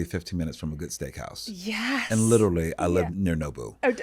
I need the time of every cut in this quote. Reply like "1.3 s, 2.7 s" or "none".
3.1 s